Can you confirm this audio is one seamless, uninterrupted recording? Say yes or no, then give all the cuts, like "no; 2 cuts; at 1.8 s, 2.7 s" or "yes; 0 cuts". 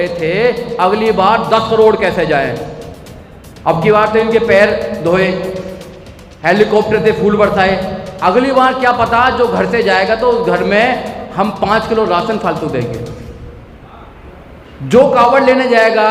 yes; 0 cuts